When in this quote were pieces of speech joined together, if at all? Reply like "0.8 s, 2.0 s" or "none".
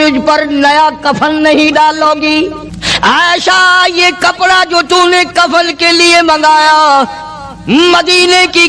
2.4 s

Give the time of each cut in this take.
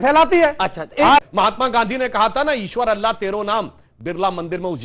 1.2 s

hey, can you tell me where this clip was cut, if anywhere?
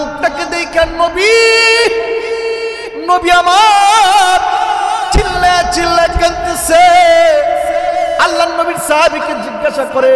none

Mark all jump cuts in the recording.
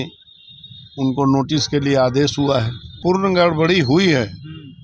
3.0 s

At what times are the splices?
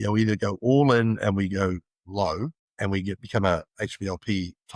2.6 s

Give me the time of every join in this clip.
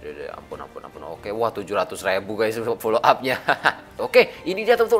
3.9 s

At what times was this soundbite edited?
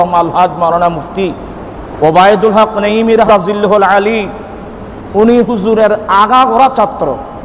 3.3 s

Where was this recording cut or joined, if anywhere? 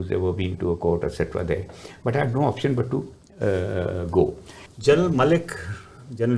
4.6 s

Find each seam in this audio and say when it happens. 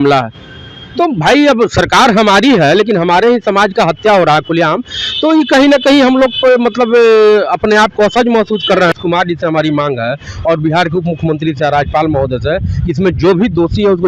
8.9 s

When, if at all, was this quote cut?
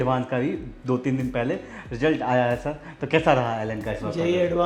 none

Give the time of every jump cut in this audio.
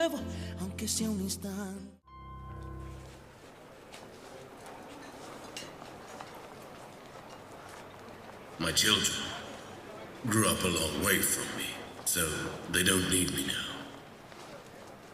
10.1 s

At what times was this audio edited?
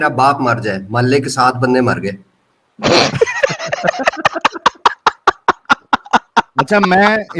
none

